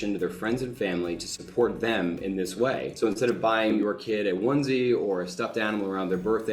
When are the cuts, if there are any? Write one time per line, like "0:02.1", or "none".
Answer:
0:02.9
0:03.8